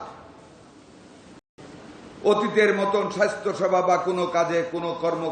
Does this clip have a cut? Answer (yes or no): no